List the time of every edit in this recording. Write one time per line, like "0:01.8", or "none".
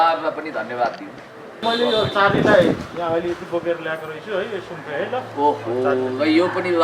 0:01.6